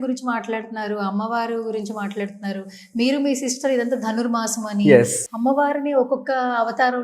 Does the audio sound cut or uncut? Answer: cut